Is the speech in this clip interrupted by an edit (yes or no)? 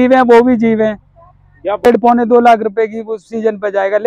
yes